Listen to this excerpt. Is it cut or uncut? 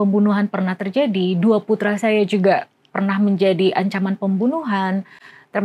uncut